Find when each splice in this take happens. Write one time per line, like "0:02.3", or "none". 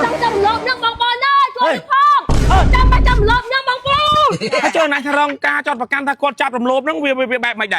0:04.4